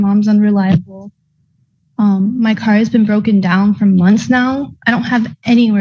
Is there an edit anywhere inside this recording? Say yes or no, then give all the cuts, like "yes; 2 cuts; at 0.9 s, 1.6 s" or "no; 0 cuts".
no; 0 cuts